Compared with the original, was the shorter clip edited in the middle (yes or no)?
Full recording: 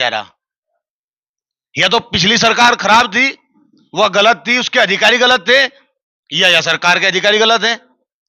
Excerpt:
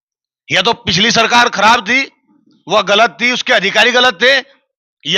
no